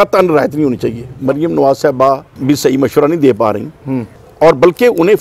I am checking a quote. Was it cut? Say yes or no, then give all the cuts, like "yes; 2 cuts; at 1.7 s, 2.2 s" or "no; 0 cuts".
yes; 3 cuts; at 1.1 s, 2.3 s, 4.2 s